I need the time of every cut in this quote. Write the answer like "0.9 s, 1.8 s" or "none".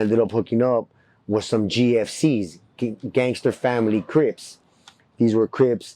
none